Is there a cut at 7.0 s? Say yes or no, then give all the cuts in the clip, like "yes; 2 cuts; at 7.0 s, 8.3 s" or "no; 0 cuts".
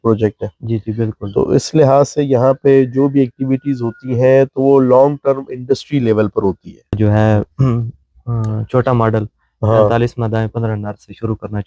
yes; 1 cut; at 7.0 s